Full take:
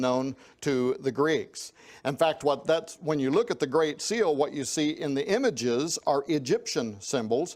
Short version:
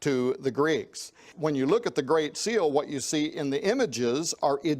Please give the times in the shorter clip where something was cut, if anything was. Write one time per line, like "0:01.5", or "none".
0:01.3